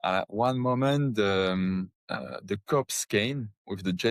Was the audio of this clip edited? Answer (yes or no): yes